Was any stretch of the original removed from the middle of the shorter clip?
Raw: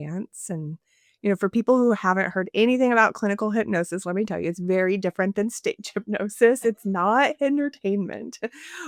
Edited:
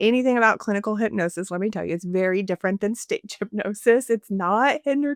no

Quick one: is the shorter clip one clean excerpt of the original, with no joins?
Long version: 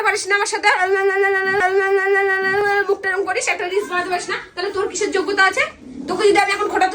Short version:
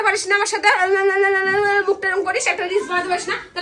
no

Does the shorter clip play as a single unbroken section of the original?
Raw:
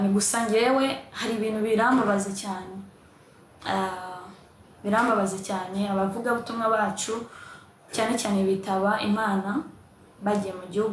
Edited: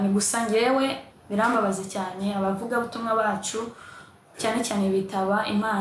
no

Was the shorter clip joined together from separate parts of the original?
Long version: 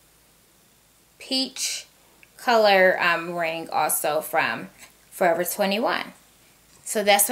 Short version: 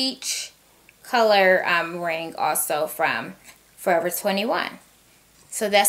no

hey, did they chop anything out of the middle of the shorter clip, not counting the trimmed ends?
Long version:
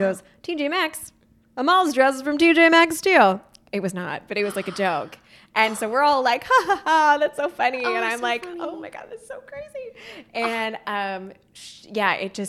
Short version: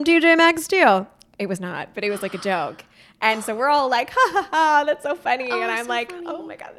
no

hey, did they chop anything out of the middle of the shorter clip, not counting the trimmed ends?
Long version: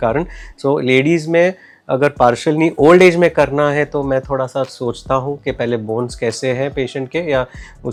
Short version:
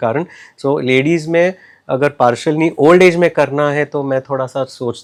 no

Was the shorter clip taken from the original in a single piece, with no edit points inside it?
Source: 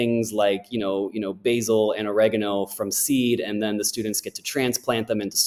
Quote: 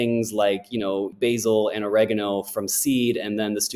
no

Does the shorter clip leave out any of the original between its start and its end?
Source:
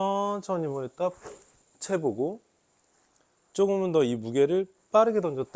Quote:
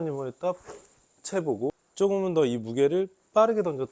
yes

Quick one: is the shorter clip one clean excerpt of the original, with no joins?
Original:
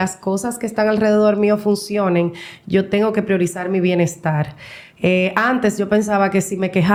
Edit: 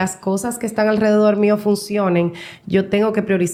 yes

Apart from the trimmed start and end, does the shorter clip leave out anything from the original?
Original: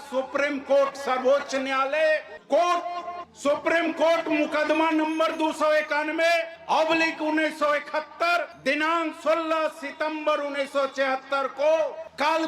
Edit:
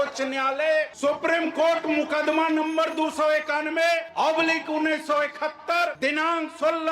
yes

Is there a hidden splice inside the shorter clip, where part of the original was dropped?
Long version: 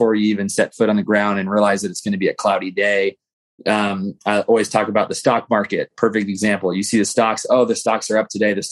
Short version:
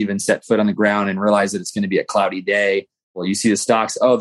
yes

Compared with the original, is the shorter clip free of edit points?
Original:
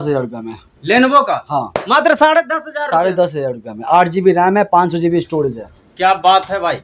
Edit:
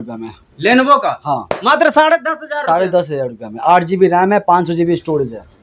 yes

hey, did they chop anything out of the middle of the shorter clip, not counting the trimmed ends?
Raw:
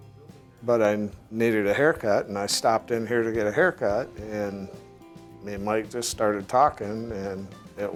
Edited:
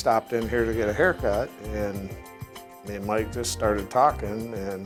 no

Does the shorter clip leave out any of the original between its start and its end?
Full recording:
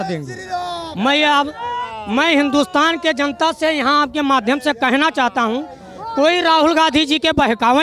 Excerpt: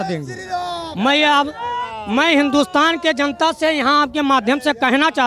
no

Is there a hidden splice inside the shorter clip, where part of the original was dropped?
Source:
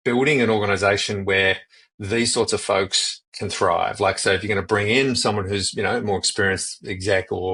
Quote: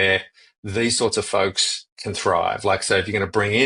no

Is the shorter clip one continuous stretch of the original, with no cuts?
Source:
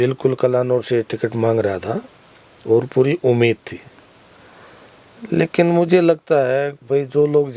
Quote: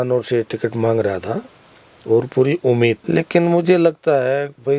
no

